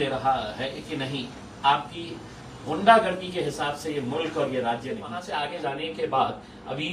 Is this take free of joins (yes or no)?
no